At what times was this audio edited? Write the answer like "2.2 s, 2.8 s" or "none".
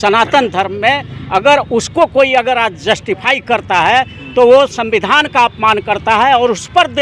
none